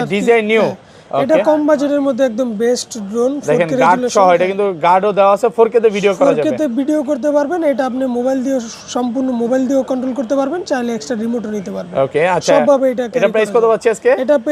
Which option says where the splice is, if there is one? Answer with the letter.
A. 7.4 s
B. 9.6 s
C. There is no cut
C